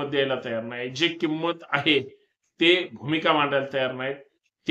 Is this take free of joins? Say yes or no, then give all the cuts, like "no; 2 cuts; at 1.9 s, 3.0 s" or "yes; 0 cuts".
yes; 0 cuts